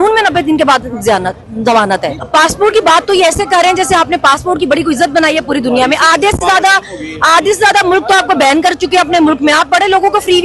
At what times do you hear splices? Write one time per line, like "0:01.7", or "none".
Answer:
0:02.2